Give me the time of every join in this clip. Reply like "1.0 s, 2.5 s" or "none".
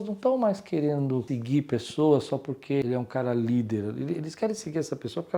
1.3 s, 2.8 s